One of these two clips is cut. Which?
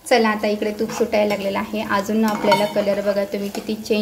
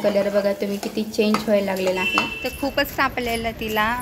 second; 1 cut; at 2.5 s

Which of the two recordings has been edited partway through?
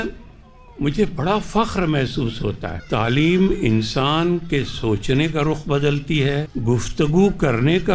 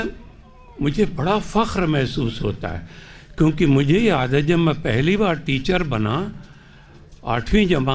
first; 2 cuts; at 2.7 s, 6.5 s

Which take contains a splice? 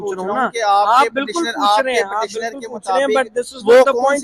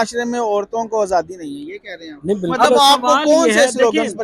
second; 1 cut; at 2.5 s

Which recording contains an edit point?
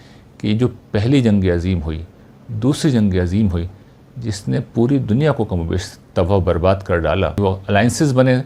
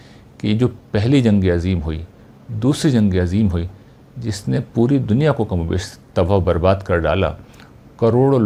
first; 1 cut; at 7.4 s

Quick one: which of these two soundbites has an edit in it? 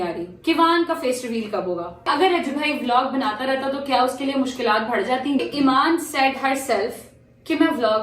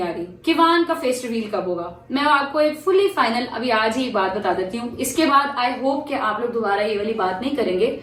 first; 2 cuts; at 2.1 s, 5.4 s

